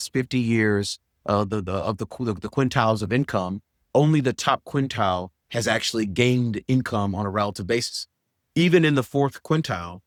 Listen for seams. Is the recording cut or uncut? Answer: uncut